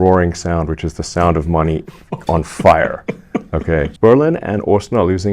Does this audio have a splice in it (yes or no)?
yes